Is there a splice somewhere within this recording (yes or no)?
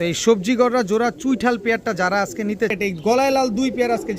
yes